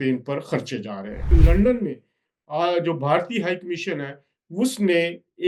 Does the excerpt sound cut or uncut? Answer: cut